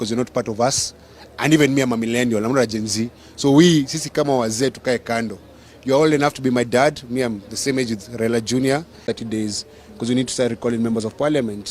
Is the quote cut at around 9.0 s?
yes; 1 cut; at 9.0 s

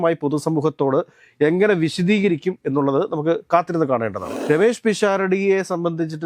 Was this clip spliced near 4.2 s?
yes; 1 cut; at 4.2 s

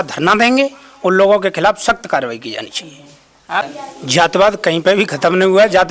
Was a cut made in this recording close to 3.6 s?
yes; 1 cut; at 3.6 s

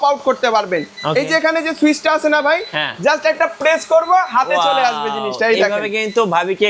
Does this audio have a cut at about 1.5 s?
no; 0 cuts

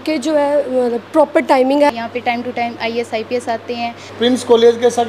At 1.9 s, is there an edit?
yes; 2 cuts; at 1.9 s, 4.0 s

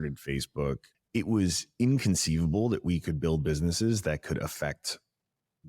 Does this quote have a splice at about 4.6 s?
no; 1 cut; at 0.9 s

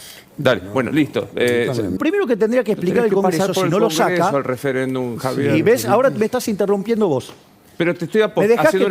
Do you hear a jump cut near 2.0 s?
yes; 1 cut; at 2.0 s

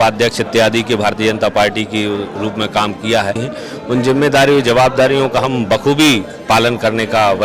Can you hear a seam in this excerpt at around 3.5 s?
yes; 1 cut; at 3.5 s

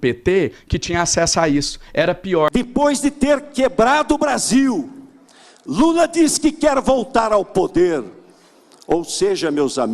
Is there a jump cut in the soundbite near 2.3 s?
yes; 1 cut; at 2.3 s

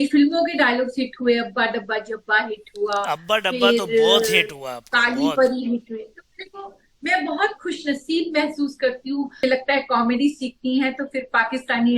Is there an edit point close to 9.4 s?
yes; 1 cut; at 9.4 s

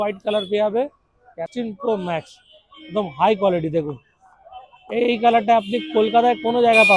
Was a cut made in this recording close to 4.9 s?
no; 1 cut; at 1.5 s

